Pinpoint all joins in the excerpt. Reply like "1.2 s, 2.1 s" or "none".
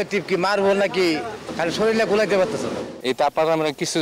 1.4 s, 2.9 s